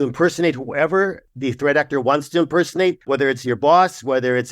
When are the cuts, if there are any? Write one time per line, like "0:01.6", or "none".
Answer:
0:01.3
0:03.0